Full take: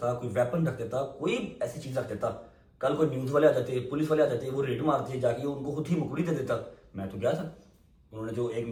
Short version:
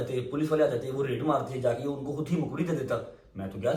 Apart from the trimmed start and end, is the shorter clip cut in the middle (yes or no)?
no